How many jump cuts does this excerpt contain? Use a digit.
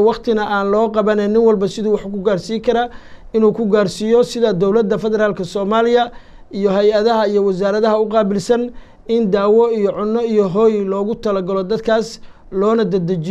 0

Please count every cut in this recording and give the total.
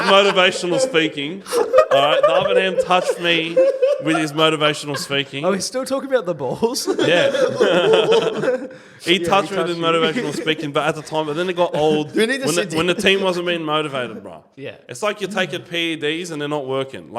0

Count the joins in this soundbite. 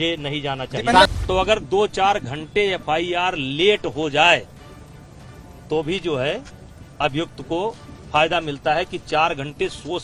1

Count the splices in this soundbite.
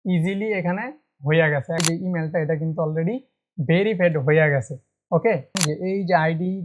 2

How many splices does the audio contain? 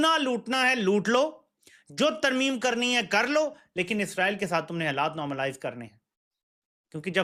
0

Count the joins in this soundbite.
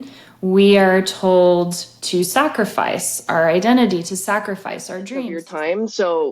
1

